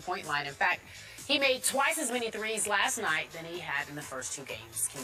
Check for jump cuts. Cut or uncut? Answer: cut